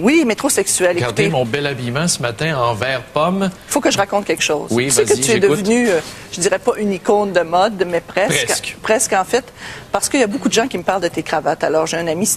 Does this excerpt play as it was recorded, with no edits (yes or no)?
no